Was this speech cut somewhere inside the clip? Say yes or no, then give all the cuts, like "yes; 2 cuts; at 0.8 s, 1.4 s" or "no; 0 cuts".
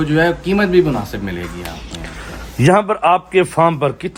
no; 0 cuts